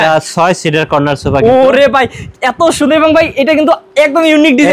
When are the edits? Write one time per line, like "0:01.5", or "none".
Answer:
none